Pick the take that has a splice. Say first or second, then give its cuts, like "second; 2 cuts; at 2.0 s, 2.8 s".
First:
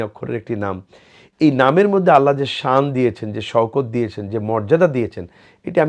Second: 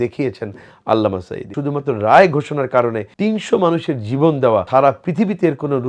second; 3 cuts; at 1.5 s, 3.1 s, 4.7 s